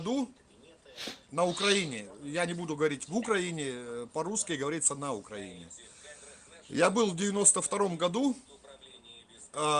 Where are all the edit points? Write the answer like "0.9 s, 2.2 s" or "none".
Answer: none